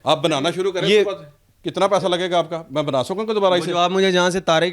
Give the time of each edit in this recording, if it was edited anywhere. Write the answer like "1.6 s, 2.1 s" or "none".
none